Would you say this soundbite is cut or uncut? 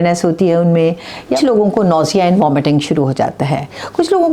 cut